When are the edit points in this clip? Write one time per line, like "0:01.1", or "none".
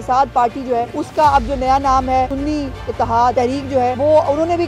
0:01.0
0:02.3
0:03.6

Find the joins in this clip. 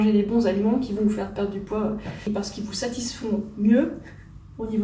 0:02.2

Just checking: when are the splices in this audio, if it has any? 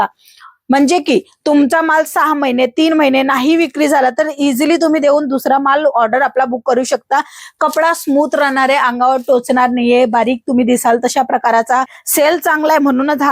0:07.4
0:12.0

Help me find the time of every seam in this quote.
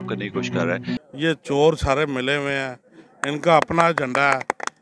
0:00.9

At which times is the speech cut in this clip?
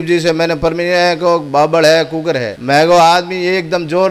0:02.5

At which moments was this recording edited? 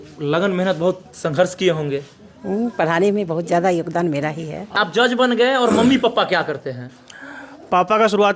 0:04.9

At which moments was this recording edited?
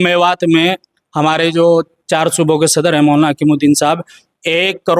none

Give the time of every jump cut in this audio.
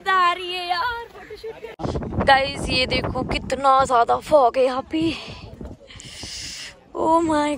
0:01.8

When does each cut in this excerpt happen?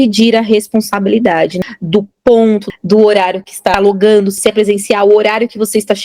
0:01.6
0:02.6
0:03.7
0:04.4

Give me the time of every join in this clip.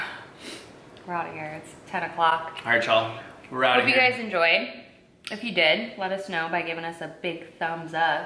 none

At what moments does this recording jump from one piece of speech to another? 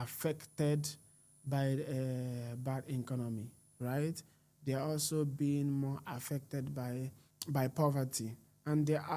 0:07.3

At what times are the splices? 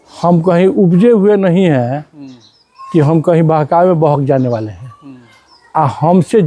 none

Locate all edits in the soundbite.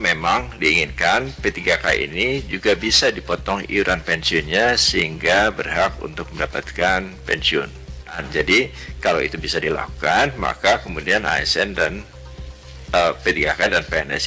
0:08.2

